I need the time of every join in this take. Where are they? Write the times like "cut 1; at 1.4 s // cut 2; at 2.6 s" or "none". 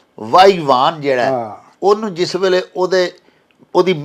none